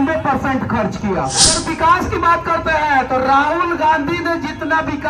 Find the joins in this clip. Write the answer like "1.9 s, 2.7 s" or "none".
1.6 s